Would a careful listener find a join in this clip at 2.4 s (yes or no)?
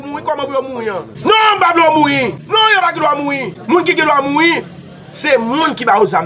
yes